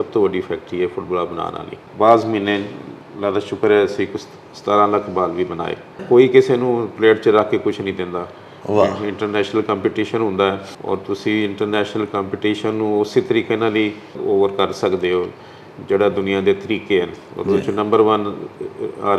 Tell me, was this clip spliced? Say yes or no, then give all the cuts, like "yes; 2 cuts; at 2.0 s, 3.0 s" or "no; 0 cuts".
yes; 4 cuts; at 1.8 s, 6.0 s, 10.7 s, 14.2 s